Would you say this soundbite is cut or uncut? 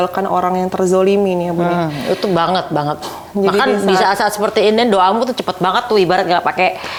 uncut